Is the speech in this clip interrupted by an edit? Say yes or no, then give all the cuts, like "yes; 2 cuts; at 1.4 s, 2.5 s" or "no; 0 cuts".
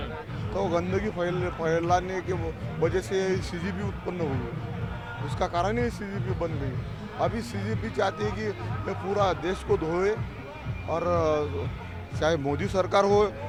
no; 0 cuts